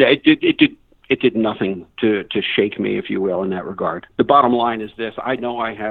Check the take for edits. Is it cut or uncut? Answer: cut